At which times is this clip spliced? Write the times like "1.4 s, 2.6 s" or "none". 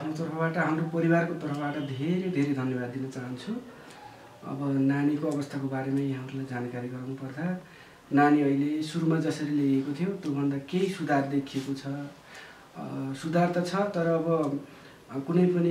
none